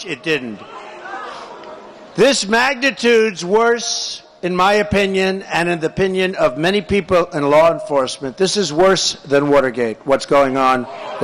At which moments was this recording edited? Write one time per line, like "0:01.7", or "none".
0:02.1